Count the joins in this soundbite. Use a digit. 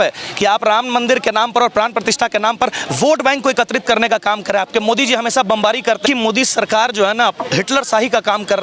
1